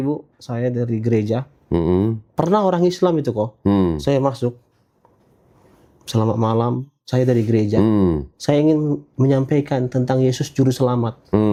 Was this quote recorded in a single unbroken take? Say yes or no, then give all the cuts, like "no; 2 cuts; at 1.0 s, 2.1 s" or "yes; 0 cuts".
yes; 0 cuts